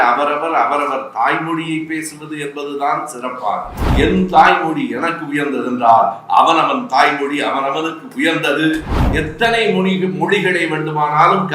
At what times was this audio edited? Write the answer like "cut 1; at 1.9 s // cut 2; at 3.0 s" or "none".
cut 1; at 3.8 s // cut 2; at 8.9 s